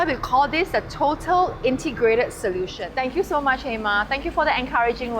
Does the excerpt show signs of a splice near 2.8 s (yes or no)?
yes